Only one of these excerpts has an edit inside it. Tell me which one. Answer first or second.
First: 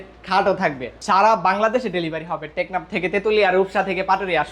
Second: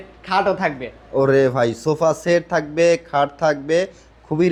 first